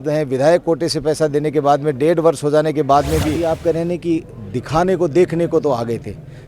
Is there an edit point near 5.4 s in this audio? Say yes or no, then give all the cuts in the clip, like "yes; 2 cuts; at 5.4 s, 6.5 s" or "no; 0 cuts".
no; 1 cut; at 3.4 s